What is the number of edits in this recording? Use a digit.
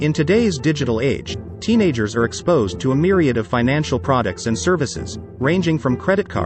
0